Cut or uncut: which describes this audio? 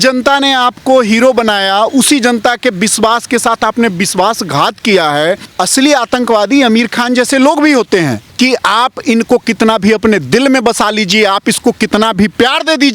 cut